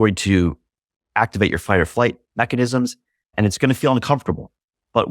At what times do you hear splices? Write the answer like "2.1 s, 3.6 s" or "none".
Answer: 2.2 s